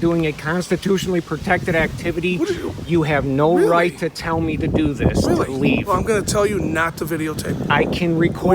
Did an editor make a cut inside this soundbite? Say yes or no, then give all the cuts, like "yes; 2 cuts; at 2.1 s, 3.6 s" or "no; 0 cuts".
yes; 1 cut; at 5.5 s